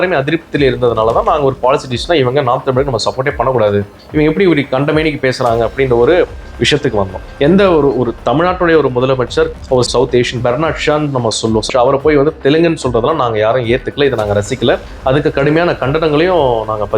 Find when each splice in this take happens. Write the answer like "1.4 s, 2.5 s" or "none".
9.5 s